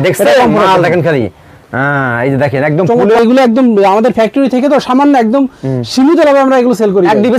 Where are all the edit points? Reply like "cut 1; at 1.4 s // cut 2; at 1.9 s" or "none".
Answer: cut 1; at 3.2 s

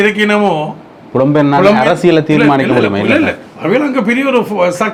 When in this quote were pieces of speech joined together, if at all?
none

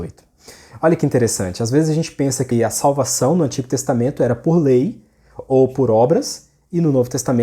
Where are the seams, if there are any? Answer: cut 1; at 2.5 s

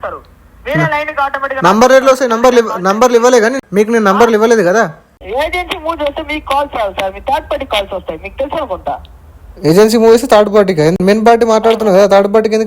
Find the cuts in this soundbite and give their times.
cut 1; at 3.6 s // cut 2; at 5.2 s

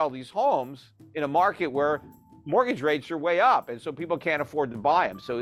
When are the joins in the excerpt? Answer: none

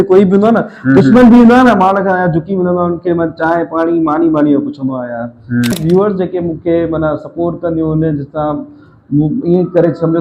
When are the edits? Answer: cut 1; at 5.7 s

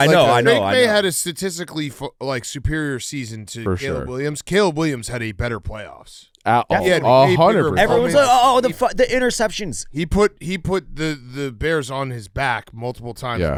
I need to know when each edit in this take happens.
none

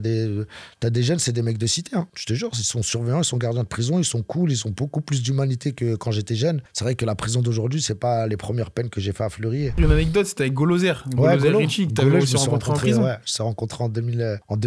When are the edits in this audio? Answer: cut 1; at 9.8 s

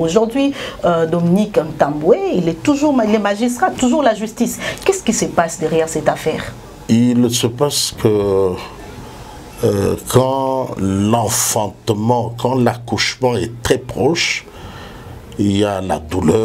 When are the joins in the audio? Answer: none

